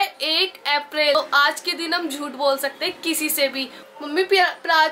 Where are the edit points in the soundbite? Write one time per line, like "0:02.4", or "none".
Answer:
0:01.1
0:03.7